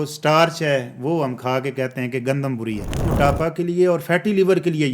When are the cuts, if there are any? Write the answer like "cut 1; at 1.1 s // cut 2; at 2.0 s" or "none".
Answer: cut 1; at 3.0 s